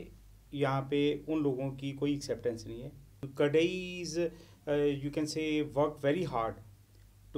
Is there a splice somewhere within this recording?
yes; 1 cut; at 3.2 s

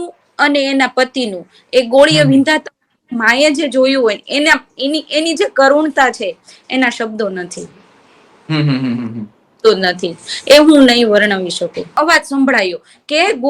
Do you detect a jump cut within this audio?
yes; 1 cut; at 11.9 s

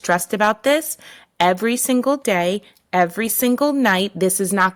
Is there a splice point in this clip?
no; 0 cuts

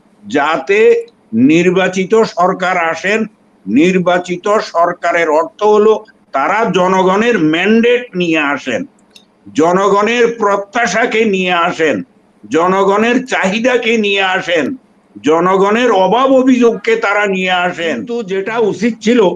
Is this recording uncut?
no; 1 cut; at 18.2 s

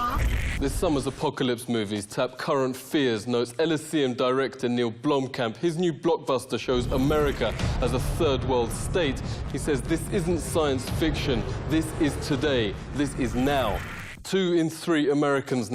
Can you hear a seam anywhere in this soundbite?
no; 0 cuts

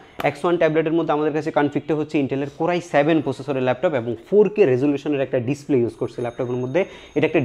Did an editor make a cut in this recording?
no; 0 cuts

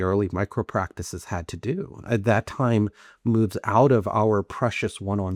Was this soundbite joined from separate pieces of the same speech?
no; 0 cuts

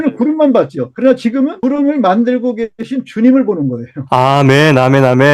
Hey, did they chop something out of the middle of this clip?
yes; 1 cut; at 1.2 s

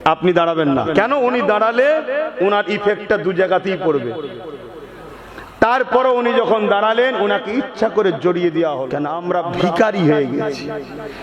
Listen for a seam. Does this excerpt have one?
yes; 1 cut; at 9.1 s

